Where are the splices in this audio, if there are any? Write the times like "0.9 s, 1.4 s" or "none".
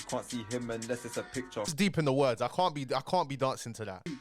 1.7 s